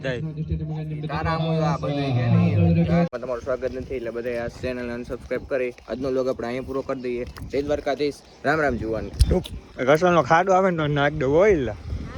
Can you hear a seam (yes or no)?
yes